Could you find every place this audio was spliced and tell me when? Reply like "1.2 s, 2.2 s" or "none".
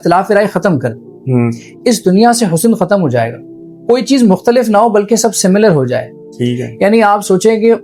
none